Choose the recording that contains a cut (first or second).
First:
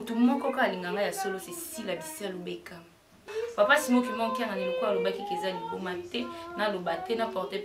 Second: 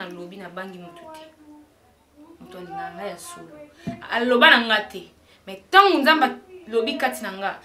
first